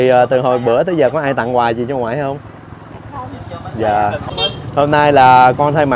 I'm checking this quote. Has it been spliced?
yes; 1 cut; at 4.4 s

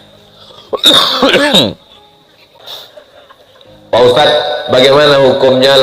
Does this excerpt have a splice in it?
yes; 1 cut; at 2.6 s

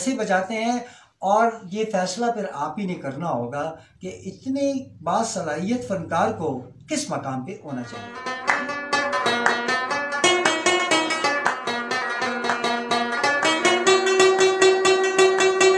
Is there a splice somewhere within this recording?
yes; 1 cut; at 8.2 s

